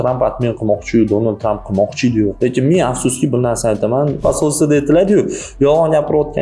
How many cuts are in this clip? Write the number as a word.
one